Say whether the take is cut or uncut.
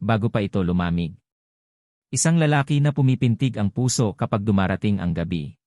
cut